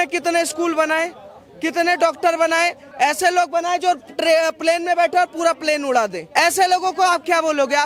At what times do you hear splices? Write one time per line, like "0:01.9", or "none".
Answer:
0:02.8
0:06.2